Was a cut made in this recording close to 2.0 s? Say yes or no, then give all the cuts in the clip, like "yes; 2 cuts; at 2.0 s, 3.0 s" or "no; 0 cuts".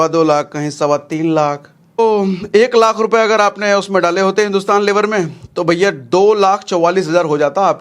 yes; 1 cut; at 2.0 s